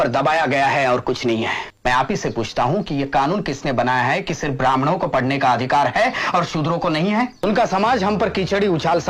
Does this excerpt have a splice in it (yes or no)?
yes